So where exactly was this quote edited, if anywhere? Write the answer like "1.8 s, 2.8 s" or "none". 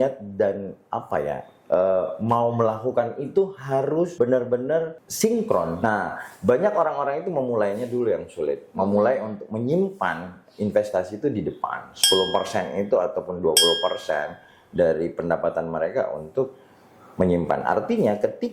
4.1 s, 5.0 s, 5.8 s